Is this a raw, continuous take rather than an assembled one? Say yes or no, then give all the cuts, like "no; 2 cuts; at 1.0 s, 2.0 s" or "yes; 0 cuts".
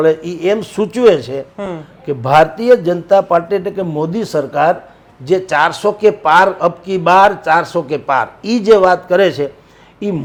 yes; 0 cuts